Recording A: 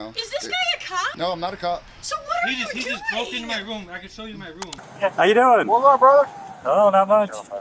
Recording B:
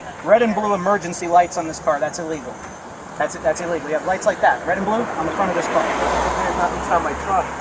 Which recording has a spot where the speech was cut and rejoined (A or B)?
A